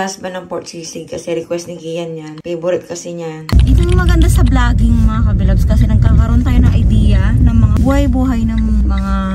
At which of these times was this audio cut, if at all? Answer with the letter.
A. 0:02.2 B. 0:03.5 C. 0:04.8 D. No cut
B